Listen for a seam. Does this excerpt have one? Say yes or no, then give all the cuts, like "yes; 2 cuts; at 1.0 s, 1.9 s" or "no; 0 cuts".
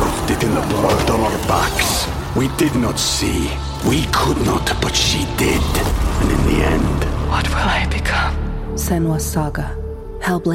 no; 0 cuts